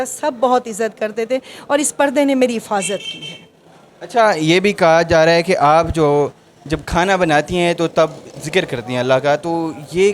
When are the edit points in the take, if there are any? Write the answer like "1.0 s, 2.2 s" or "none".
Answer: none